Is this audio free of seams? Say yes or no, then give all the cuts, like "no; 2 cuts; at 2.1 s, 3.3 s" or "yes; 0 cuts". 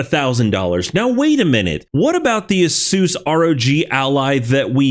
no; 1 cut; at 1.8 s